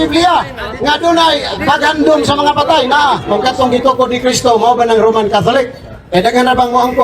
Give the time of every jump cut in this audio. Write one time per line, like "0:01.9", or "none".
0:03.2